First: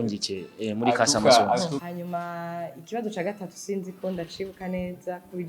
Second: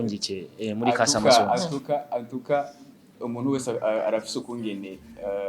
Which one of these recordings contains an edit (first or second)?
first